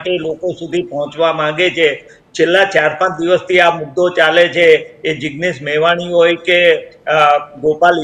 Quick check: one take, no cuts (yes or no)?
yes